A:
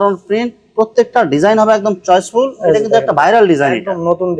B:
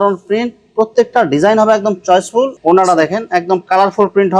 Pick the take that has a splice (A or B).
B